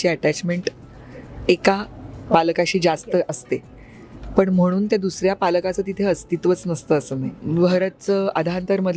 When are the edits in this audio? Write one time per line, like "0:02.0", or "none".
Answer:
0:07.3